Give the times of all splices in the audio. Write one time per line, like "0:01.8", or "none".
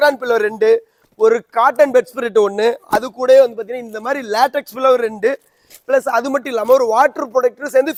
none